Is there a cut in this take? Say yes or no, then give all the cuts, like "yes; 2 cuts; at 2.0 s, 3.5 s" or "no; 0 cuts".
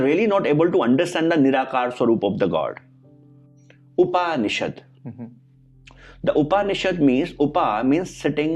yes; 1 cut; at 3.4 s